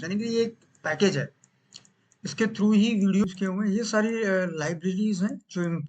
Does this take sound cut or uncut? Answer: cut